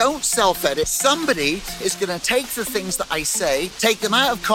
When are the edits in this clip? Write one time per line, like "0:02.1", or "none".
0:00.9
0:03.7